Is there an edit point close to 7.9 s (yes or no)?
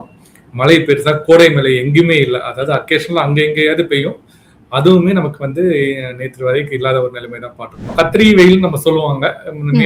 yes